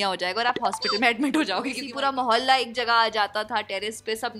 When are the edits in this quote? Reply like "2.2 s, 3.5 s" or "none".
1.9 s